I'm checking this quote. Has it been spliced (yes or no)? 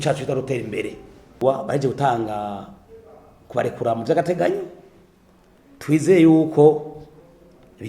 yes